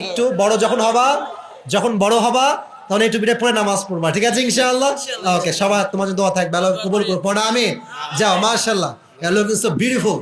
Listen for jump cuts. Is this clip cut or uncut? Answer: uncut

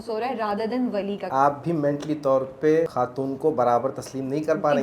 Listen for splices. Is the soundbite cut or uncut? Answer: cut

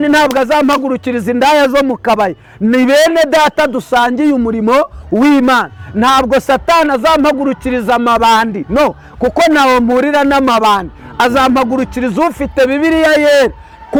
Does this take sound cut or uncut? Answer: uncut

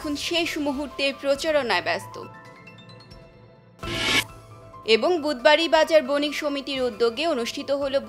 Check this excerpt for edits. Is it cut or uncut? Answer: uncut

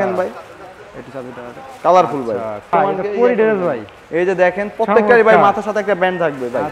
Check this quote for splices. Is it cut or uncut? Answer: cut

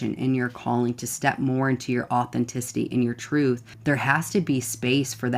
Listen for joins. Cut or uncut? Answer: cut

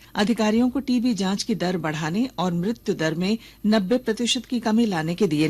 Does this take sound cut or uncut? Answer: uncut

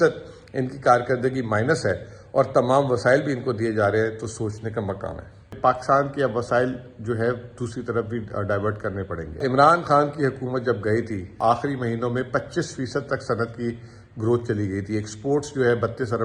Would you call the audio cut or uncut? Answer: cut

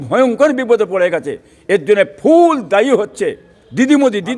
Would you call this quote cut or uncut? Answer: uncut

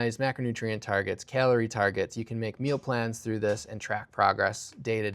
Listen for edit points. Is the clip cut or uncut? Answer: uncut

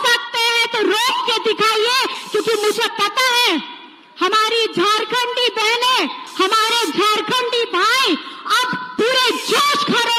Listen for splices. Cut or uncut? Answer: uncut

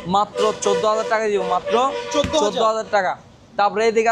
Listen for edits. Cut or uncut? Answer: uncut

